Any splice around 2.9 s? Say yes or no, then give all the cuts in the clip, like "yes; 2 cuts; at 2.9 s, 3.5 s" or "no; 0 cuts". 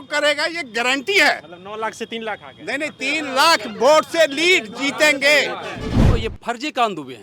no; 1 cut; at 5.9 s